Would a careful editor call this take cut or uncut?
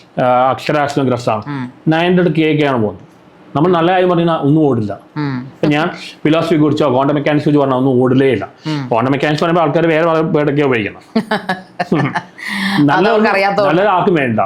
uncut